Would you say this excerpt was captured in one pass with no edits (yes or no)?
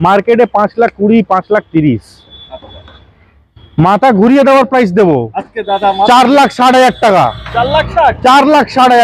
yes